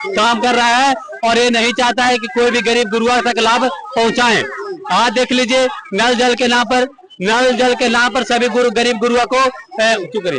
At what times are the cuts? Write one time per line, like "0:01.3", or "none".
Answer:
none